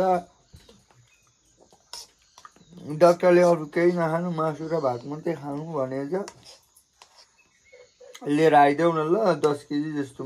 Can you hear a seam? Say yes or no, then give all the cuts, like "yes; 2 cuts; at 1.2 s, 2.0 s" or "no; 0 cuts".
no; 0 cuts